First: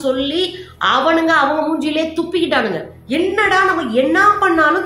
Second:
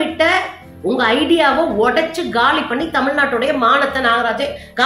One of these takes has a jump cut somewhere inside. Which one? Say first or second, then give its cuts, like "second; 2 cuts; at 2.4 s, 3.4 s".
first; 1 cut; at 2.9 s